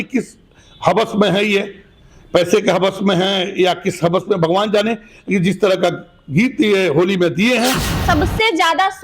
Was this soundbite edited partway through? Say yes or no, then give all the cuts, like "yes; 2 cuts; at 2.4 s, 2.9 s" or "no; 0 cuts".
yes; 1 cut; at 8.0 s